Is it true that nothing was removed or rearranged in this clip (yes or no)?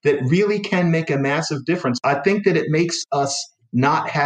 no